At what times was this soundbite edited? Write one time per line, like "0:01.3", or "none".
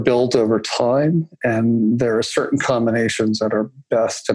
none